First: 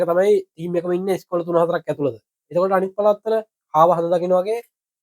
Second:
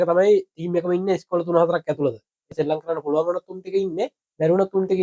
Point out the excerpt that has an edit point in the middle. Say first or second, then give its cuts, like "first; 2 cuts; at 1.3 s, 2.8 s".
second; 1 cut; at 2.5 s